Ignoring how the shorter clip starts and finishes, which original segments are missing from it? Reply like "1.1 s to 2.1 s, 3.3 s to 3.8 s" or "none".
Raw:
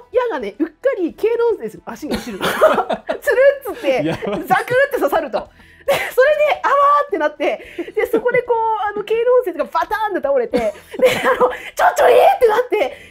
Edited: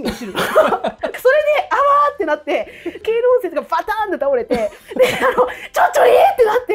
3.2 s to 6.1 s, 7.9 s to 9.0 s